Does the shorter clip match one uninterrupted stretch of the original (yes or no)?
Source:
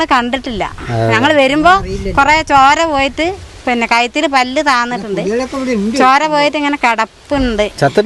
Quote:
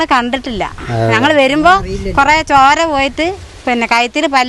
yes